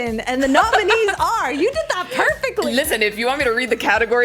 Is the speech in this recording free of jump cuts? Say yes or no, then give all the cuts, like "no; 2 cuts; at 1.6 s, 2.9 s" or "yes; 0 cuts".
no; 1 cut; at 2.7 s